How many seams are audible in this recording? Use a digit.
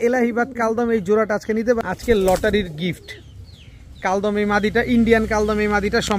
1